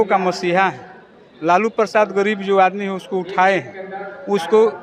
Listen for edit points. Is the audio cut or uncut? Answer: uncut